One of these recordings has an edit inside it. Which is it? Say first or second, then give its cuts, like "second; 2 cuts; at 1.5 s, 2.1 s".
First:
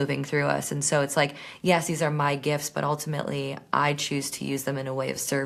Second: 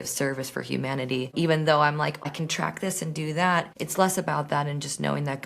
second; 3 cuts; at 1.3 s, 2.3 s, 3.8 s